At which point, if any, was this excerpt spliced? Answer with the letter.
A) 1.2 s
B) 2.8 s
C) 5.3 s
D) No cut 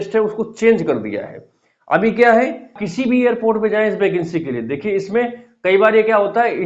B